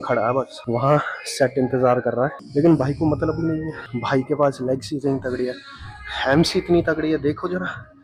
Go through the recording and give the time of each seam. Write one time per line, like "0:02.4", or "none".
none